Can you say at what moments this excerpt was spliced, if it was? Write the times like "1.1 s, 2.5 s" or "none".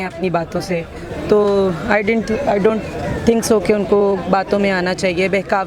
none